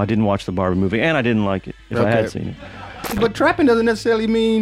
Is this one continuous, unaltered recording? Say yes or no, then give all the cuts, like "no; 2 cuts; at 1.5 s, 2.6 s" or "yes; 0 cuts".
no; 1 cut; at 3.2 s